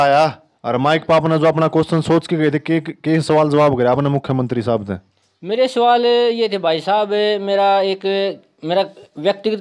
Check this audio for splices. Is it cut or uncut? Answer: uncut